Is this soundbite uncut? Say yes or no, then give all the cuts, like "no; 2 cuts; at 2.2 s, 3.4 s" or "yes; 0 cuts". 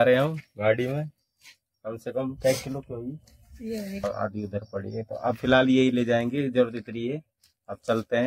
no; 1 cut; at 4.0 s